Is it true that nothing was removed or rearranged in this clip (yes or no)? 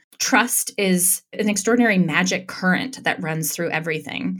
no